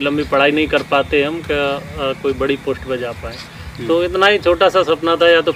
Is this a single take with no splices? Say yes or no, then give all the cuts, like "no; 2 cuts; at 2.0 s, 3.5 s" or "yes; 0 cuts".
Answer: yes; 0 cuts